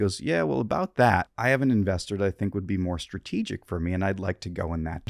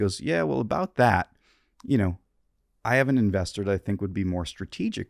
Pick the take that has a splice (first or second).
first